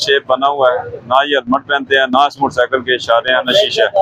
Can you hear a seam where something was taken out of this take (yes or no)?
no